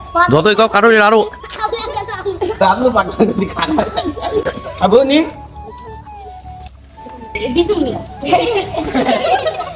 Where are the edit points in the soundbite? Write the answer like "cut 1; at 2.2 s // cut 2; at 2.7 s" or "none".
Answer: cut 1; at 4.4 s